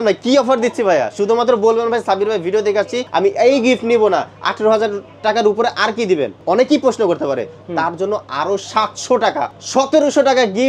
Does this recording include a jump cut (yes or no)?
yes